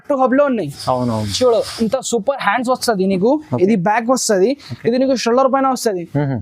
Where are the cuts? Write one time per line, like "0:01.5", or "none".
none